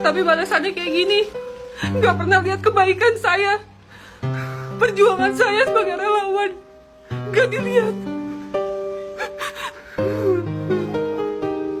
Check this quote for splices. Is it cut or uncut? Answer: uncut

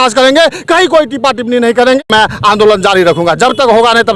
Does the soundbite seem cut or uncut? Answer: cut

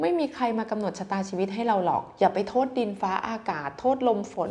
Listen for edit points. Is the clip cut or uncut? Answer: uncut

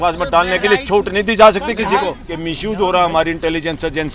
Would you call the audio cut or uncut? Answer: cut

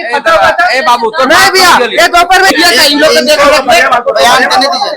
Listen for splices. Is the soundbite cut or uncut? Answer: cut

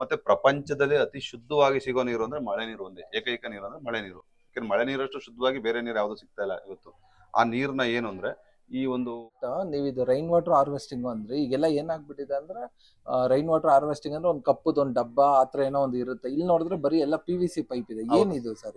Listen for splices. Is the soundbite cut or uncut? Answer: uncut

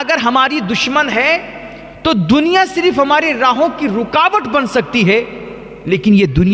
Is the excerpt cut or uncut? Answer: uncut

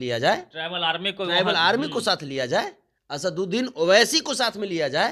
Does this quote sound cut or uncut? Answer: uncut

